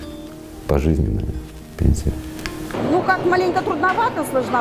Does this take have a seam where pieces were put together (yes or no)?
yes